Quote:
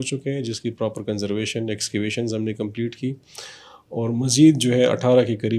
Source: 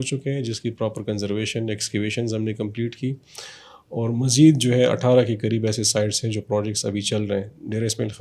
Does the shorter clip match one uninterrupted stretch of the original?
yes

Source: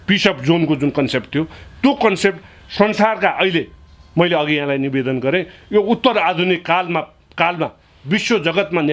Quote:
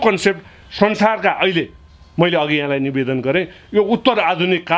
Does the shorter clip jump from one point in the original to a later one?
no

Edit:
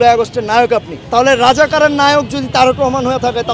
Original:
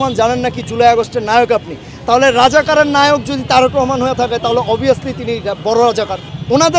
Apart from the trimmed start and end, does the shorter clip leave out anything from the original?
yes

